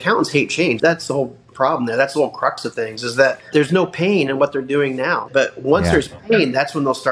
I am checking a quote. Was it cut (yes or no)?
yes